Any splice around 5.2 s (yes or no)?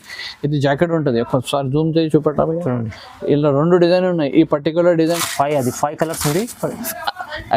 no